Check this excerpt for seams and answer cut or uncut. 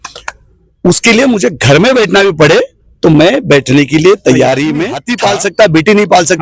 cut